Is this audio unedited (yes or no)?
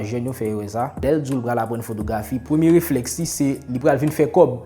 no